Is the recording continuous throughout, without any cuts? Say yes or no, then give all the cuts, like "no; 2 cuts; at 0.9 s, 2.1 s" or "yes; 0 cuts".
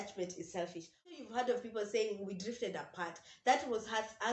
no; 1 cut; at 1.1 s